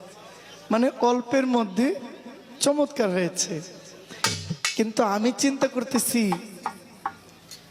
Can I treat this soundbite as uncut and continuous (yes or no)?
yes